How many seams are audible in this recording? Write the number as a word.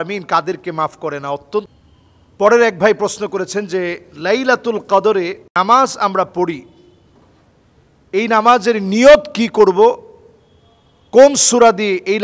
one